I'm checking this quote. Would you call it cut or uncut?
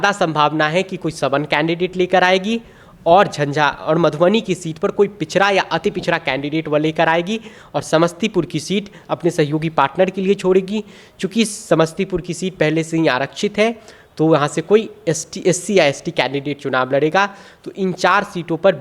uncut